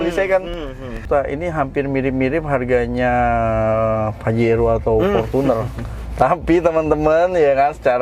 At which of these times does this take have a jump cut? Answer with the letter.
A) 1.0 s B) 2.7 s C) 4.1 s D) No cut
A